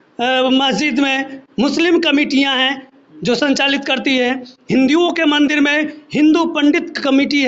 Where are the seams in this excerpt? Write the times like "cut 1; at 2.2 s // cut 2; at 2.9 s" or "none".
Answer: none